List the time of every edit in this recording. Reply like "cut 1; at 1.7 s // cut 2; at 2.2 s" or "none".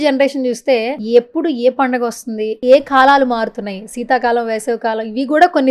cut 1; at 1.0 s // cut 2; at 2.5 s